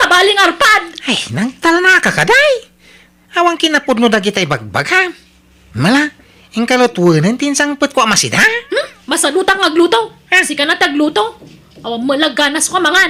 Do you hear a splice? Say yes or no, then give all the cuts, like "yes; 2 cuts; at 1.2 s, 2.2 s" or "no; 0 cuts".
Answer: no; 0 cuts